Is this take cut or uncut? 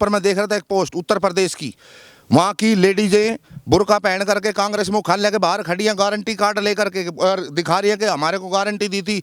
uncut